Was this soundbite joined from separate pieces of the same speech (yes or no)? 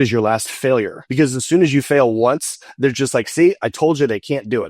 yes